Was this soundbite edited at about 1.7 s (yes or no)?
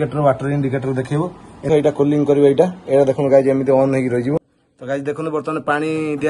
yes